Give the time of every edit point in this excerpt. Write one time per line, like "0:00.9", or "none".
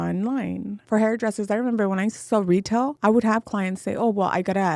0:00.8
0:02.9